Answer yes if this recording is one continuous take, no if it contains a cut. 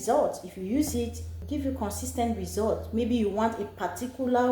no